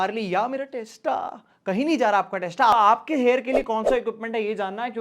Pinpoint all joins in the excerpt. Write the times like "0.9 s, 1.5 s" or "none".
2.7 s